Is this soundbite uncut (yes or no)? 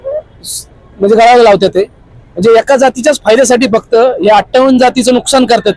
yes